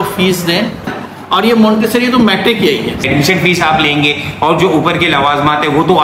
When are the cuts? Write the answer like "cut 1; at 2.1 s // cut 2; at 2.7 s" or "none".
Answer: cut 1; at 0.9 s // cut 2; at 3.0 s

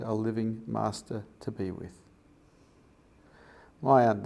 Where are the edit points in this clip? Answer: cut 1; at 2.2 s

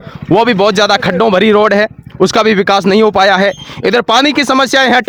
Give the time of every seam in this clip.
none

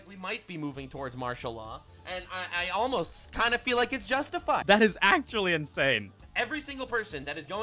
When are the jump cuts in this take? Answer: cut 1; at 4.6 s // cut 2; at 6.2 s

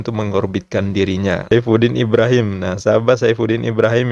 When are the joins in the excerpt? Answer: cut 1; at 1.5 s

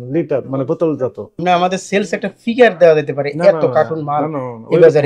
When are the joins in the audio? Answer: cut 1; at 1.3 s

